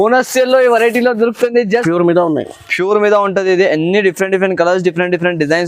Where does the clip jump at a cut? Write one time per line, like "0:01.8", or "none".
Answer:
0:01.8